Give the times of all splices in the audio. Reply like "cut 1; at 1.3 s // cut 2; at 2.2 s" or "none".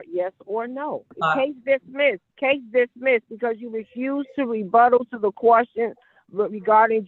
cut 1; at 1.1 s // cut 2; at 2.3 s